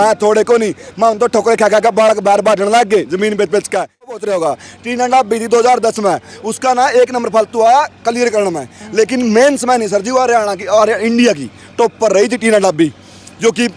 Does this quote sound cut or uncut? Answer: cut